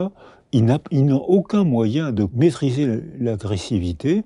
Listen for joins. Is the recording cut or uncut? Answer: cut